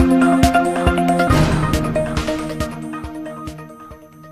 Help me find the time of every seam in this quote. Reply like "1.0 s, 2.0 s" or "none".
1.2 s